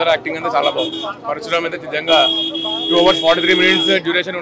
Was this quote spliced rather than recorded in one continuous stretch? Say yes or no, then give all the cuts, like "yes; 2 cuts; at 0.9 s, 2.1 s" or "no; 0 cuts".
no; 0 cuts